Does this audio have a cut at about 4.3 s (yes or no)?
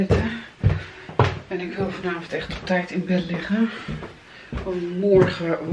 no